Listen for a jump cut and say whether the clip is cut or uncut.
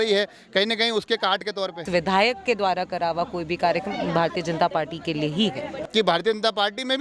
cut